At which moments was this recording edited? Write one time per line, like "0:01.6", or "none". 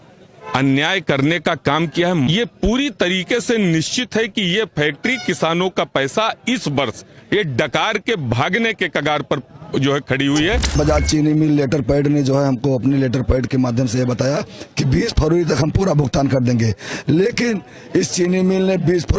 0:02.3
0:10.7